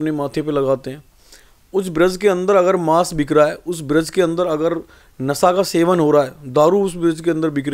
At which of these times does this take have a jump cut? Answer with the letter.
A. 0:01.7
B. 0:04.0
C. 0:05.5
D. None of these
D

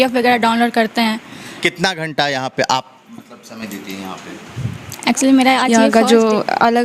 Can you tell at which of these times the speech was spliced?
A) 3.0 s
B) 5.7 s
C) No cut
B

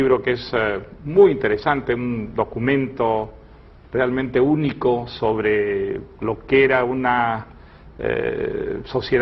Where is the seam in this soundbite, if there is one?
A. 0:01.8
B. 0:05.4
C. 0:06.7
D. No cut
A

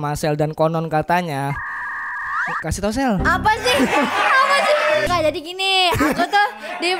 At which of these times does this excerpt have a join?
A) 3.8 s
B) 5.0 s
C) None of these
B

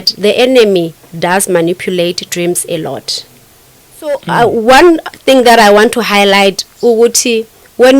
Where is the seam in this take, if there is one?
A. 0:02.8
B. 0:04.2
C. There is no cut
B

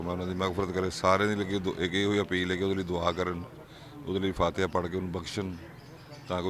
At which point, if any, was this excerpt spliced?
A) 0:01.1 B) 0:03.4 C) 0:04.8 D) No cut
D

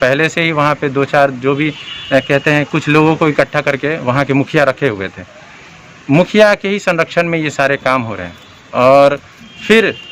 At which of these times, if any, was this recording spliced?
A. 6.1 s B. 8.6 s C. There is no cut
C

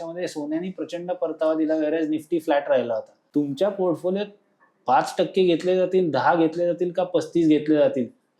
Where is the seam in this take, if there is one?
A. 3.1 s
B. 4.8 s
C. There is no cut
A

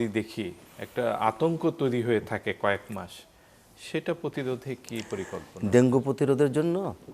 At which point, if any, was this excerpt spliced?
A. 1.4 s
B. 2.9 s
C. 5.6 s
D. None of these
D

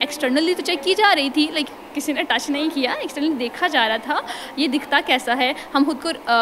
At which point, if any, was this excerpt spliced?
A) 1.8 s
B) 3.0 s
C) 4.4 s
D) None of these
D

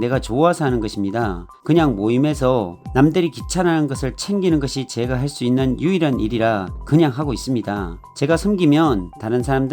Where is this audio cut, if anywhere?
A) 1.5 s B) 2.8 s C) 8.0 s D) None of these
A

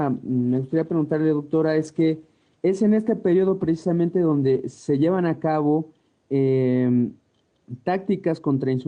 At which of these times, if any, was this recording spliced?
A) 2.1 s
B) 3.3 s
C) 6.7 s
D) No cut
C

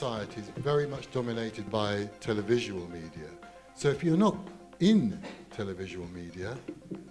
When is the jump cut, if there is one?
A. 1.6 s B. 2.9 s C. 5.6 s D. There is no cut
A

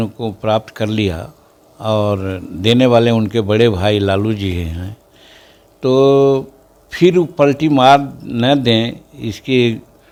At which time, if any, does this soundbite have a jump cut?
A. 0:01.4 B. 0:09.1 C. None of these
C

